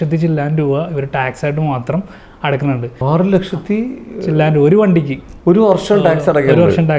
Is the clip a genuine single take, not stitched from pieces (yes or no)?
no